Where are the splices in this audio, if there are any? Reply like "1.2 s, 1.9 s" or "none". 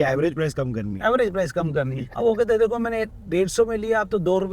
2.0 s